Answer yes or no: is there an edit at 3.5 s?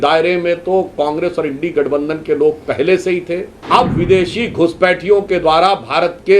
yes